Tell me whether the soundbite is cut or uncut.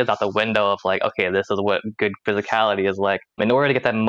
cut